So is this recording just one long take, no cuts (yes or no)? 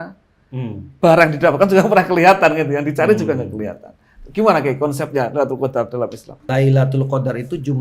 no